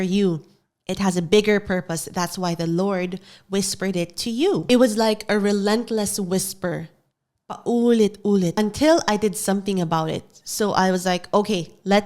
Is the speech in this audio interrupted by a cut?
yes; 2 cuts; at 4.6 s, 8.5 s

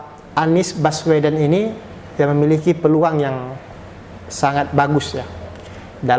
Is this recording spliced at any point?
no; 0 cuts

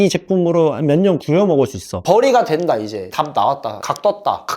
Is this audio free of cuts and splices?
no; 2 cuts; at 1.9 s, 3.0 s

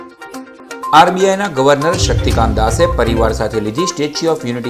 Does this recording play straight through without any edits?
yes; 0 cuts

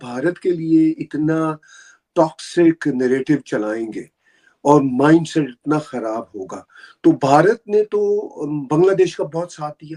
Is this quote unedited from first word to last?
yes; 0 cuts

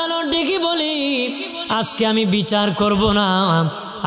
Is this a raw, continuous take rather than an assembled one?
yes; 0 cuts

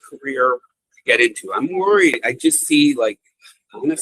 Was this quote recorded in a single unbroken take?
no; 1 cut; at 2.2 s

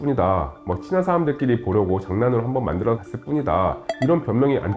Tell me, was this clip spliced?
no; 0 cuts

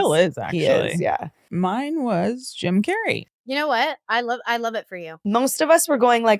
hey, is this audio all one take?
no; 3 cuts; at 1.4 s, 3.3 s, 5.0 s

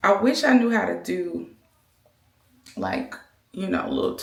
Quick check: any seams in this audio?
no; 0 cuts

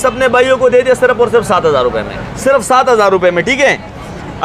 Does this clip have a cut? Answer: no; 0 cuts

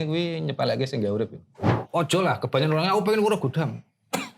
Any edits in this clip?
yes; 1 cut; at 1.7 s

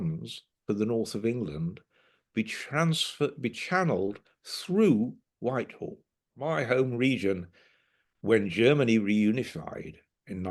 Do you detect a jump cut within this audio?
yes; 1 cut; at 6.5 s

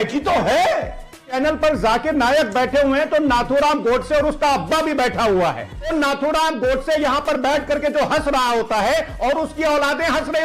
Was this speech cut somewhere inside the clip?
yes; 2 cuts; at 1.4 s, 5.9 s

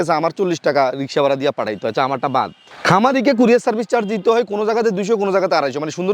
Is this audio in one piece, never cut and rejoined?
no; 1 cut; at 2.7 s

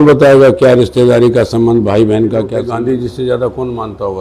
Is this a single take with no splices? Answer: no; 1 cut; at 2.6 s

